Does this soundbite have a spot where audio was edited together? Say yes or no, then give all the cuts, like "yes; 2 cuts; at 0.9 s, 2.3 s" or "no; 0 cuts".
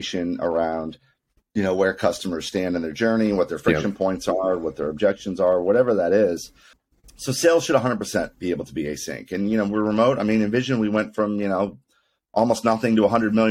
no; 0 cuts